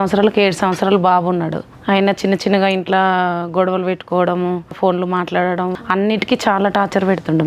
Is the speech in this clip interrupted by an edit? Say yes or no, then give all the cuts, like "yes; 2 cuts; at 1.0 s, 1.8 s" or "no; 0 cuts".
yes; 3 cuts; at 1.7 s, 4.8 s, 5.8 s